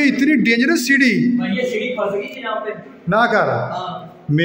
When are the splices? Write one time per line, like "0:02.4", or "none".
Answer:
none